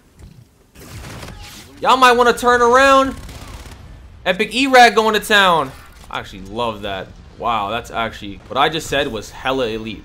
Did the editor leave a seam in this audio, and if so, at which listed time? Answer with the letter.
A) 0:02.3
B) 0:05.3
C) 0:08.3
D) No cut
C